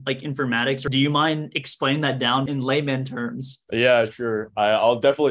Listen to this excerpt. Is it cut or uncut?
cut